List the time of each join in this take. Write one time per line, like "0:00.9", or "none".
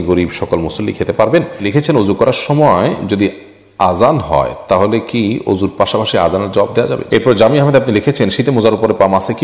0:01.6
0:07.0